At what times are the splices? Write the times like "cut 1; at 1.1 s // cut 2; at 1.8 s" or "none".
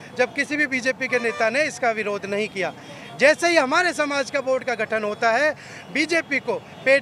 none